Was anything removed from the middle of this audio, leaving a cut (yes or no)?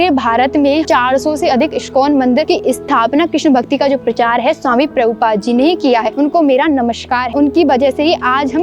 yes